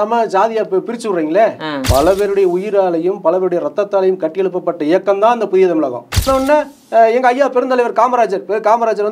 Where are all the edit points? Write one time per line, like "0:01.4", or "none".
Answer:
0:01.8
0:06.2